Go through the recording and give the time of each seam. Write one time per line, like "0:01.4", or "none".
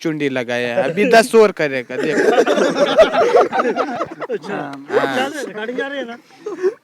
none